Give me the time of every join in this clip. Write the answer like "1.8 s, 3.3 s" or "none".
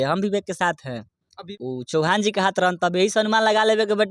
1.5 s